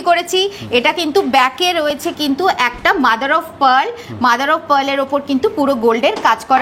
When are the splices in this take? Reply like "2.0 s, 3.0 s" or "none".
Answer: none